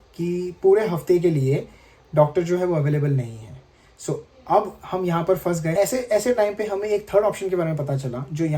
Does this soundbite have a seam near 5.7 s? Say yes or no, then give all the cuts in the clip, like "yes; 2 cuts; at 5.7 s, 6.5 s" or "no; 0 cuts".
yes; 1 cut; at 5.7 s